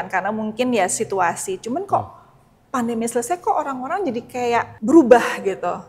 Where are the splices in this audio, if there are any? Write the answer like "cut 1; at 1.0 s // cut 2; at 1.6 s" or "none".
cut 1; at 4.7 s